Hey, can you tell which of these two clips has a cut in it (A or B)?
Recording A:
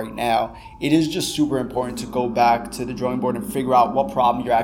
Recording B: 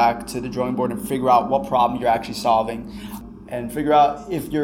B